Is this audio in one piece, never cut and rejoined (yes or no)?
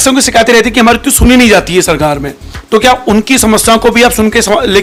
yes